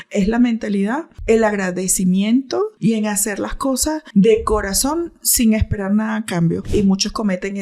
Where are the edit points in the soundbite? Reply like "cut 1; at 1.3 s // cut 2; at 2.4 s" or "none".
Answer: cut 1; at 1.1 s // cut 2; at 2.7 s // cut 3; at 4.0 s // cut 4; at 6.6 s